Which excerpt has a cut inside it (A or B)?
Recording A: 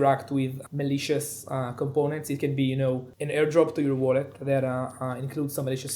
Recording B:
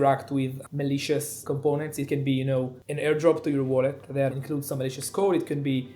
B